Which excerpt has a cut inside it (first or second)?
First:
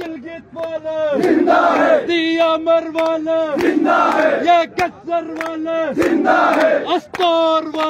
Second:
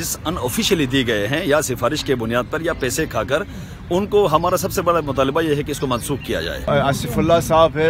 second